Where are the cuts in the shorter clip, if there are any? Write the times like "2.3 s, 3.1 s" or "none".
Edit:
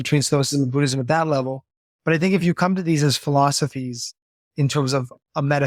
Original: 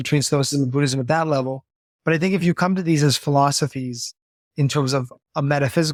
none

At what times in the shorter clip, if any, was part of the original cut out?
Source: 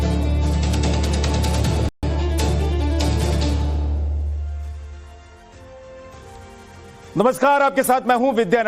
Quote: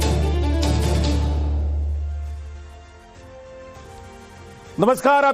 none

